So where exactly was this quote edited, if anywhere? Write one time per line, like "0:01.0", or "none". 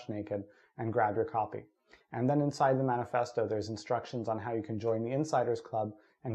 none